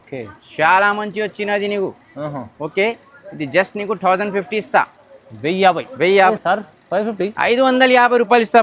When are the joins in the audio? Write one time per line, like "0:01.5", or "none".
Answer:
0:06.3

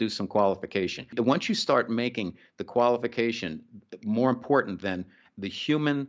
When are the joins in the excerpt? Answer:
0:01.1

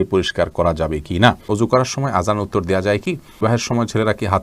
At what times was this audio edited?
0:01.4
0:03.4

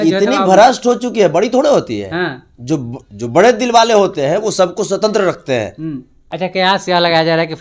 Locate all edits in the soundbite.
0:06.3

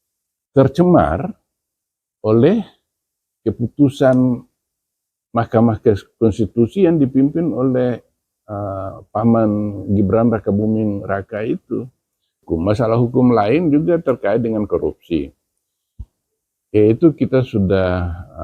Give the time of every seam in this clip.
0:12.4

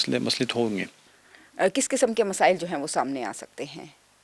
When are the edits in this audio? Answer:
none

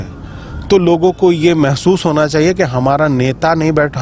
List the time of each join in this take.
none

